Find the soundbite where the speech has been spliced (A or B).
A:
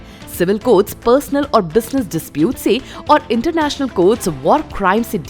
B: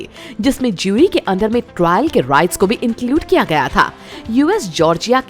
B